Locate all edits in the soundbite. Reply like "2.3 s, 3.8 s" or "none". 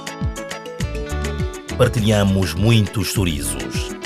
1.0 s